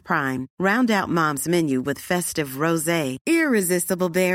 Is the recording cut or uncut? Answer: uncut